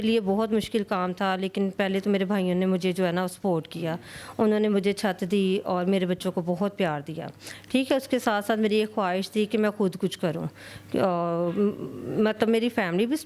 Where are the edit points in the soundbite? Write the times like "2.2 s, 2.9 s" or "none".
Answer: none

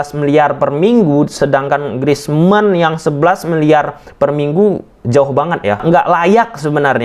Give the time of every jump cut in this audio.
5.8 s

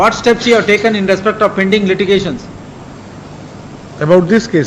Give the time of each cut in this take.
none

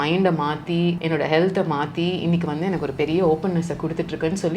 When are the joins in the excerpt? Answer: 1.0 s

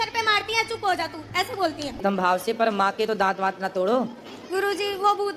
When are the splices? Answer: 2.0 s

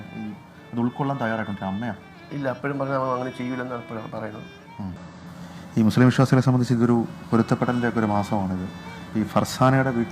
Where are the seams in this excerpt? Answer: 4.9 s

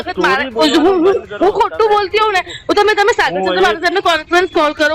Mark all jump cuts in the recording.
none

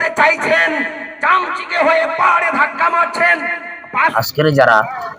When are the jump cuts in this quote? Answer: 4.1 s

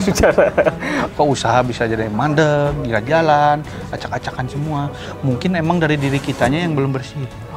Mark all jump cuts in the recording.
1.0 s

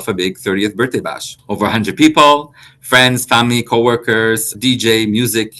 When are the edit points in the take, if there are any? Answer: 1.3 s, 4.5 s

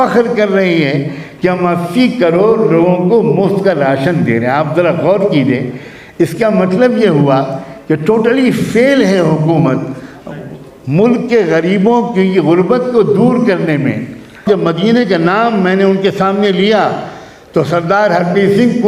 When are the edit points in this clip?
14.4 s

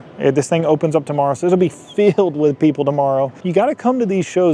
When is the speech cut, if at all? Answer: 3.4 s

